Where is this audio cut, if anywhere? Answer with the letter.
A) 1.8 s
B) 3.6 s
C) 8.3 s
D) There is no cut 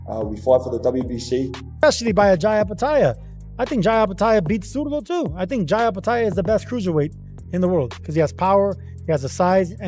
A